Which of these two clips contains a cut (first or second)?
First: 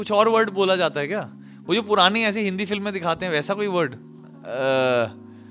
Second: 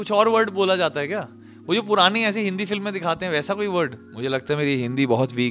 second